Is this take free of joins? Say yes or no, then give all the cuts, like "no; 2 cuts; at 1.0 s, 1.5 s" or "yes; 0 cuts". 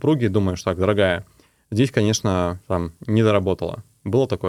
yes; 0 cuts